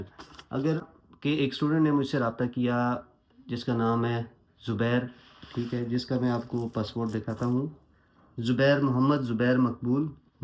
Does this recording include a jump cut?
yes; 1 cut; at 0.9 s

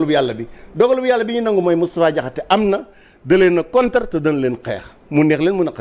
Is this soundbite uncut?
yes; 0 cuts

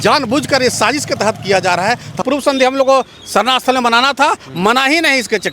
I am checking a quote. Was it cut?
yes; 1 cut; at 2.2 s

